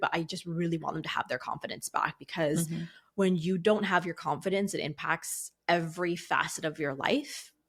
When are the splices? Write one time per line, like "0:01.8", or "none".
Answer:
none